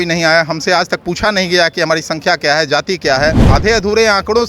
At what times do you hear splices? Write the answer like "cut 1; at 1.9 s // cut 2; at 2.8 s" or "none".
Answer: cut 1; at 3.4 s